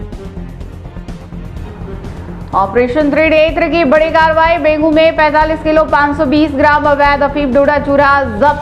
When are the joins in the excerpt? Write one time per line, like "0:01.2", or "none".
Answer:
0:01.6